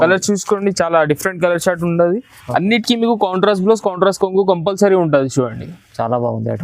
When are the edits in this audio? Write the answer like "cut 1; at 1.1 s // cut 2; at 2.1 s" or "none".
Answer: none

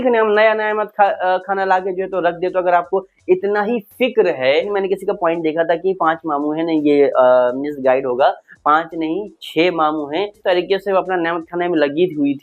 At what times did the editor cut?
cut 1; at 4.5 s // cut 2; at 10.4 s

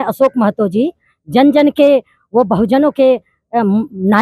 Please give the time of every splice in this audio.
none

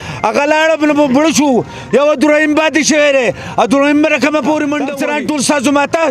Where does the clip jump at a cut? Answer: cut 1; at 5.0 s

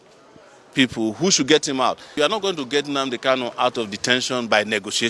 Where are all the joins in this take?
cut 1; at 2.2 s

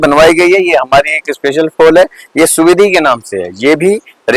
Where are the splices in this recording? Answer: none

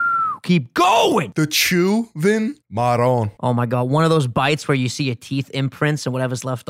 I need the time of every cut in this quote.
cut 1; at 1.2 s // cut 2; at 2.6 s // cut 3; at 3.3 s

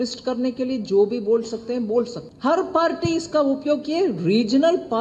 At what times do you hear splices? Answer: cut 1; at 2.2 s

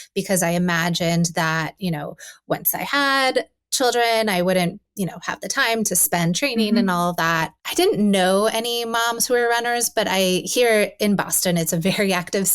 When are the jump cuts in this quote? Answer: cut 1; at 7.5 s

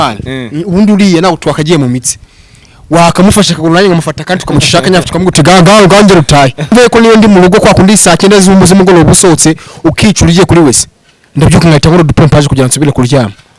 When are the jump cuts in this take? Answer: cut 1; at 6.7 s

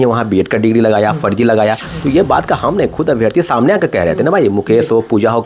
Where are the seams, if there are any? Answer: none

